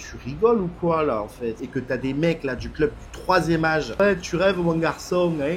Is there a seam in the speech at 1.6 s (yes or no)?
yes